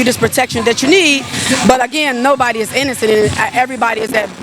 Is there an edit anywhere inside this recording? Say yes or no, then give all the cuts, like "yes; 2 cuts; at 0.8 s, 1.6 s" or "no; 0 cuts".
no; 0 cuts